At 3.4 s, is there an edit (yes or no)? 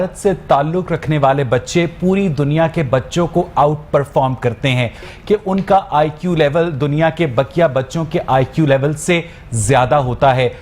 no